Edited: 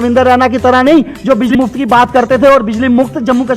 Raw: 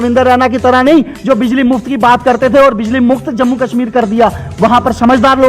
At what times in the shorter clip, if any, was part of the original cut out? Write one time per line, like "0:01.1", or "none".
0:01.5